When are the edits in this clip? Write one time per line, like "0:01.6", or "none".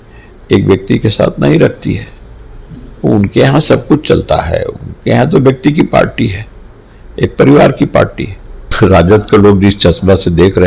0:08.7